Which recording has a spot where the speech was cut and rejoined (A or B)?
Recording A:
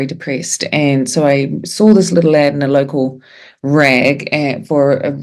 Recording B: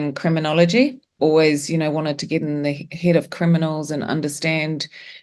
B